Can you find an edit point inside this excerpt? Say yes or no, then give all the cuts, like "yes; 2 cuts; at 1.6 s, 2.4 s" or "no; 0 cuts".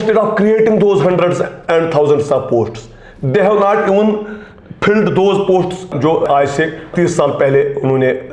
no; 0 cuts